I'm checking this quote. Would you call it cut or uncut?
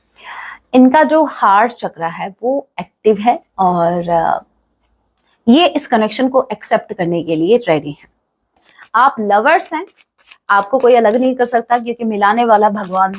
cut